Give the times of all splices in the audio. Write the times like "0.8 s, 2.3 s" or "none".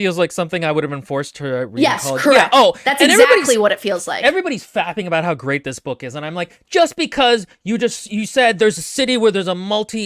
4.2 s